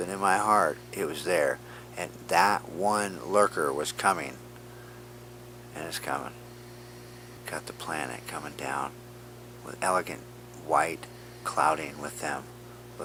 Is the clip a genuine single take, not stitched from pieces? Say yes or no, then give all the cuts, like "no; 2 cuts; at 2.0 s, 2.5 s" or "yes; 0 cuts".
yes; 0 cuts